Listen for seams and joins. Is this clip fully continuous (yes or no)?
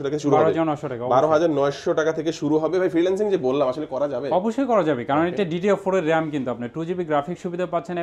yes